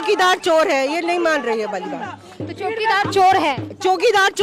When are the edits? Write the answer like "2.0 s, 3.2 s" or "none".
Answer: none